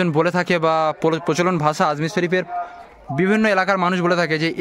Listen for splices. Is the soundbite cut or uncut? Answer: uncut